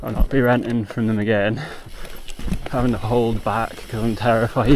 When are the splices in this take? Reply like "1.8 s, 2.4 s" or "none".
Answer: 2.6 s